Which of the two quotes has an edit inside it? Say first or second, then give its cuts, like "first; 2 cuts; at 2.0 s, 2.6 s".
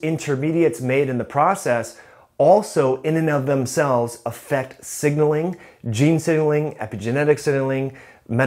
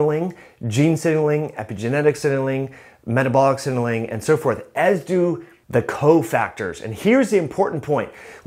second; 1 cut; at 5.5 s